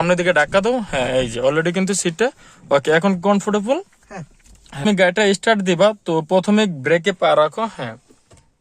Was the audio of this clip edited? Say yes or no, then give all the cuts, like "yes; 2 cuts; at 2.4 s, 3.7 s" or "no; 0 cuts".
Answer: yes; 1 cut; at 4.9 s